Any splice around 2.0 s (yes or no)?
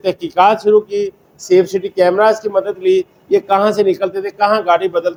no